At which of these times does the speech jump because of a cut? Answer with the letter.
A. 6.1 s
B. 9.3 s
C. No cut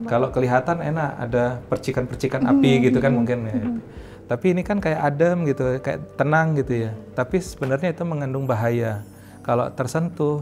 C